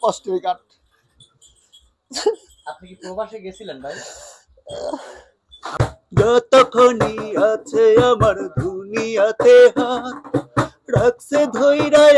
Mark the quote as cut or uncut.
cut